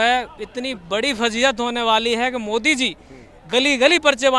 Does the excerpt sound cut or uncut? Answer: uncut